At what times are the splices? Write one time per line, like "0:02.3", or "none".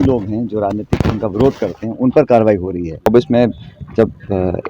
0:03.1